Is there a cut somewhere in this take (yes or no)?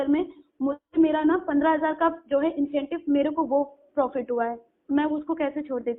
no